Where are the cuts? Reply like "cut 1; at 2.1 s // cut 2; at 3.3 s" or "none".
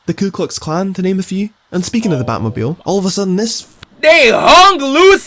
cut 1; at 1.1 s